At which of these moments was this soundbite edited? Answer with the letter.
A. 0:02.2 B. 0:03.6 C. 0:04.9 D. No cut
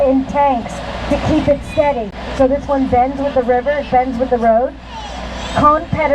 A